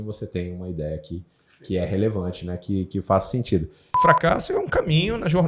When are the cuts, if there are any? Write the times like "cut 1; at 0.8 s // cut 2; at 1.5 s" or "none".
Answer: cut 1; at 3.9 s